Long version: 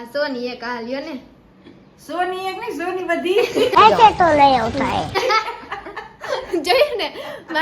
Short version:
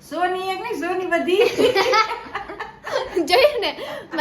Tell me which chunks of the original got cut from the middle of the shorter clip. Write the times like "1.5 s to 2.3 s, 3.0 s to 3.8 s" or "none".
3.7 s to 5.1 s